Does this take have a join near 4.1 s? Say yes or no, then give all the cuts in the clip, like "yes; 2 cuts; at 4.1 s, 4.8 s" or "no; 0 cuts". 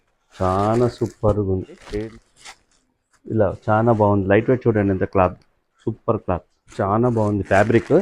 no; 2 cuts; at 2.0 s, 6.6 s